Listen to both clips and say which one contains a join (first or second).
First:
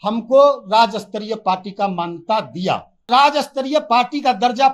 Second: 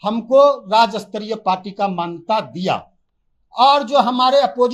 first